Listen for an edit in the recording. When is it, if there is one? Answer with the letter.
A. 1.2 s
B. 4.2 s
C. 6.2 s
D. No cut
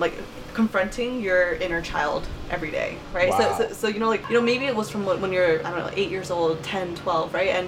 B